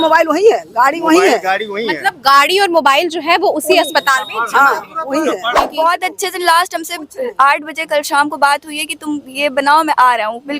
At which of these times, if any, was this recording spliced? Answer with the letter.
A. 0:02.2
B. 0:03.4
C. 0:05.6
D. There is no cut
C